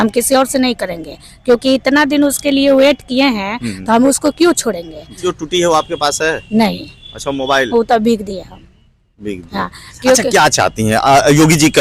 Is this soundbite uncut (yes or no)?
no